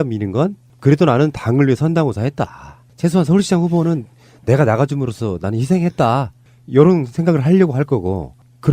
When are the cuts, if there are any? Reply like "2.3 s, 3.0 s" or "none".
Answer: 6.1 s